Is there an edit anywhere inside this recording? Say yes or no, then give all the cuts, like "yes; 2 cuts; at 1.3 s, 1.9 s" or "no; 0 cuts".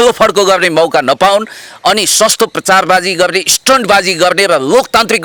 no; 0 cuts